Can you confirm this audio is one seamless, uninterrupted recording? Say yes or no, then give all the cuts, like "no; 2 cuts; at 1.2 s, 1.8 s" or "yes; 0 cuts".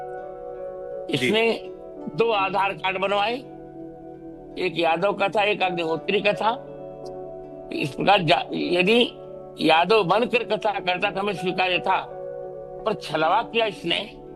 yes; 0 cuts